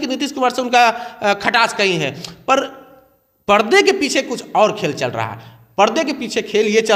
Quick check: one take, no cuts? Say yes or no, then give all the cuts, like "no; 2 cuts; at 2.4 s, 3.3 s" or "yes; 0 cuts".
yes; 0 cuts